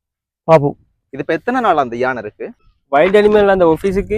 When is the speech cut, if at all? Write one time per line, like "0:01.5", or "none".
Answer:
0:02.6